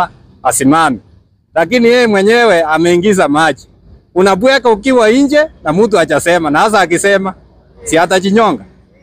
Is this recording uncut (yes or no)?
yes